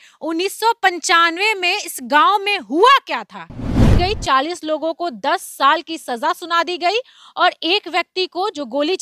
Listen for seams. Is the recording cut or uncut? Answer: cut